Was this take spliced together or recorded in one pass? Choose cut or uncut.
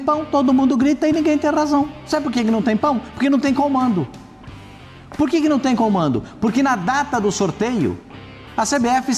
uncut